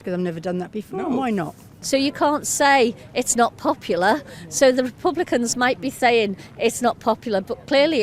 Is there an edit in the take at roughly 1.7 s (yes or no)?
yes